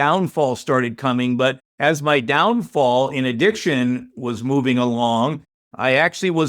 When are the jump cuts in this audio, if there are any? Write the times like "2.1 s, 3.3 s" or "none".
1.7 s